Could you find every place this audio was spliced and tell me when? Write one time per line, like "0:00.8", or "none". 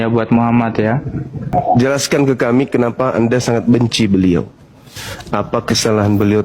0:01.5